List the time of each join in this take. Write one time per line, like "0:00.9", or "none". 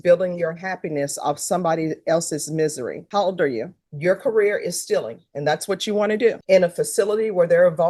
0:03.8
0:06.4